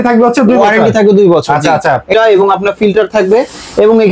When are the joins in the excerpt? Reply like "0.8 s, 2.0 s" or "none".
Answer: 2.1 s